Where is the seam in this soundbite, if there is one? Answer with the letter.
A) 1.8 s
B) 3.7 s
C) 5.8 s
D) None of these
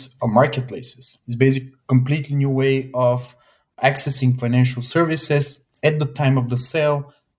B